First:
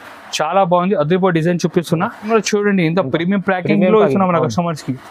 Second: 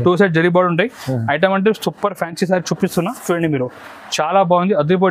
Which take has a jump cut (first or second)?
first